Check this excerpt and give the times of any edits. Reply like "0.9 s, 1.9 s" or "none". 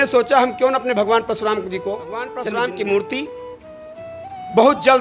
2.3 s